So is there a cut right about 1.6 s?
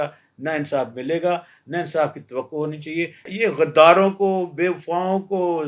no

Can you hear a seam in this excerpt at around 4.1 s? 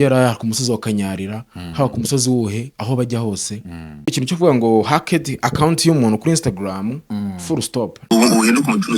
yes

